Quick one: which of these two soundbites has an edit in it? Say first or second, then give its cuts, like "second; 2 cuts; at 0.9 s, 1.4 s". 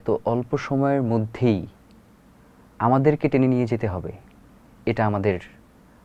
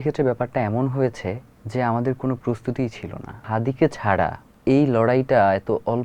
second; 3 cuts; at 1.5 s, 3.4 s, 4.5 s